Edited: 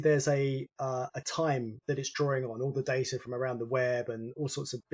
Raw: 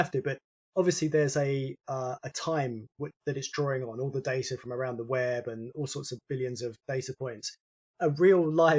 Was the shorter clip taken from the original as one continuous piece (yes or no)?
no